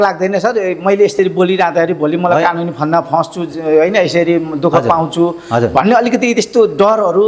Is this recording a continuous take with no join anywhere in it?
yes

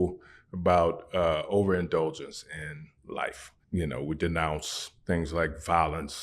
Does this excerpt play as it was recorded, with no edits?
no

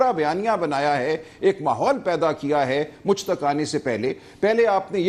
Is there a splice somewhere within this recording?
no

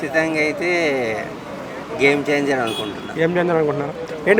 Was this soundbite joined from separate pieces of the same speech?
no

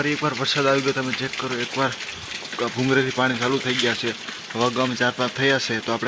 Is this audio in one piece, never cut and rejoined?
yes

